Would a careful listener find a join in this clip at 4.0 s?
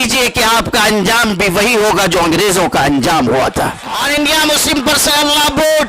yes; 1 cut; at 4.0 s

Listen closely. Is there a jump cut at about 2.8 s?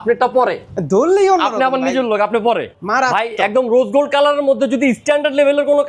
yes; 1 cut; at 2.8 s

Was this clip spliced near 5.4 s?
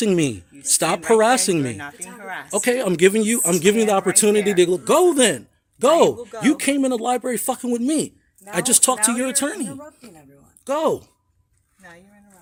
no; 0 cuts

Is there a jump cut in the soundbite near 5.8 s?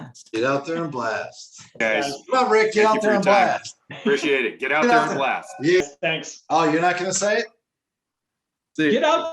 yes; 2 cuts; at 1.8 s, 5.8 s

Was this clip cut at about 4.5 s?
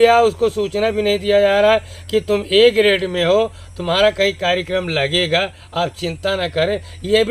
no; 0 cuts

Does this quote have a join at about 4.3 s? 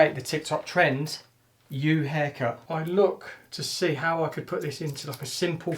no; 1 cut; at 2.6 s

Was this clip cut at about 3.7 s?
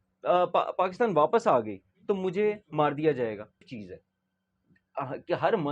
yes; 1 cut; at 3.7 s

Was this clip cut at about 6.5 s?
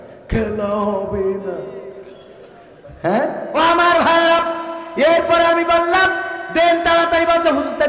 no; 1 cut; at 3.5 s

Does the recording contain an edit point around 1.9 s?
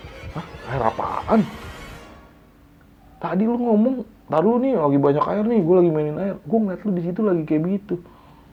no; 0 cuts

